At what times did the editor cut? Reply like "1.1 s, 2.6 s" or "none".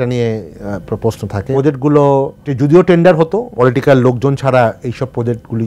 1.5 s, 2.4 s, 3.5 s